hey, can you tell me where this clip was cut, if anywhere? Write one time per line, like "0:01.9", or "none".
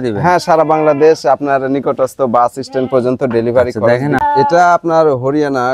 0:04.2